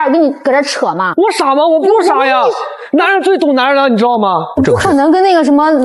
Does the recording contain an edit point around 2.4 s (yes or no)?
no